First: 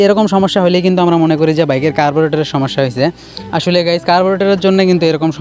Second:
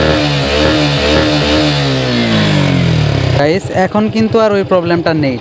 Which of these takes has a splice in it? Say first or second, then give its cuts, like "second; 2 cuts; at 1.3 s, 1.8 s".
second; 1 cut; at 3.4 s